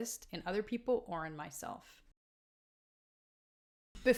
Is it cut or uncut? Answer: uncut